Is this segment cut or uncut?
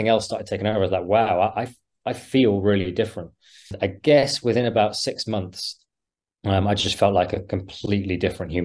cut